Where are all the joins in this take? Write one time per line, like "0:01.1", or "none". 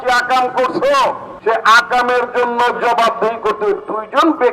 0:01.3